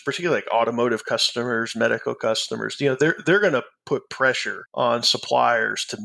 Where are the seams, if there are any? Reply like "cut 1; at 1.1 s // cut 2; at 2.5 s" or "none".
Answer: none